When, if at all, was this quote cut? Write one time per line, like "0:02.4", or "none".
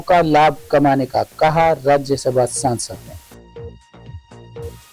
0:03.0